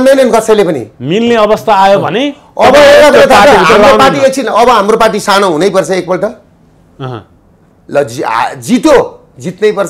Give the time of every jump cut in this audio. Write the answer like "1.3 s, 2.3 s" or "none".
none